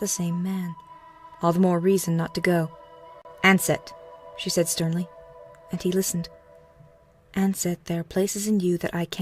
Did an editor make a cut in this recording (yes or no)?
yes